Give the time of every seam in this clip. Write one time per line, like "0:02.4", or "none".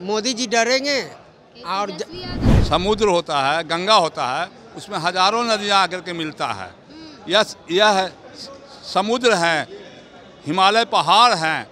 0:02.5